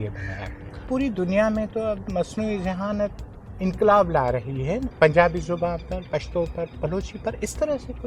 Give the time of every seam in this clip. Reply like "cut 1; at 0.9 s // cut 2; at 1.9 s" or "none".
cut 1; at 0.8 s // cut 2; at 4.9 s

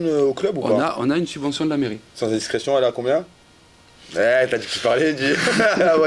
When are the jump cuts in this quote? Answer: none

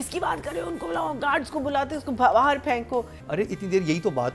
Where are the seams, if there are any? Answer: cut 1; at 3.2 s

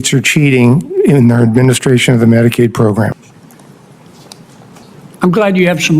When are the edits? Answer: cut 1; at 3.1 s // cut 2; at 4.8 s

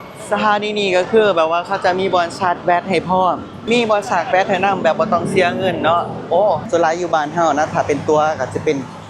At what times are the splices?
cut 1; at 3.6 s // cut 2; at 6.6 s

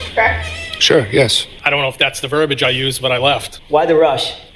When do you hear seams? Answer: cut 1; at 1.5 s

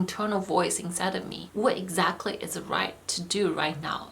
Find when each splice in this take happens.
cut 1; at 1.4 s

